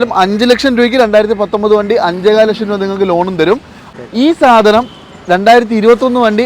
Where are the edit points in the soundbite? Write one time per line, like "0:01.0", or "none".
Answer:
0:03.8